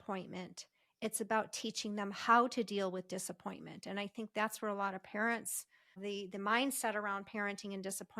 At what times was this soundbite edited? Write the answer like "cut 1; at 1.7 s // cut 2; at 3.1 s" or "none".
cut 1; at 6.0 s